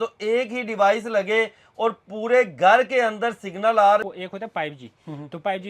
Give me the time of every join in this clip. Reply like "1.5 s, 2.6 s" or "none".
4.0 s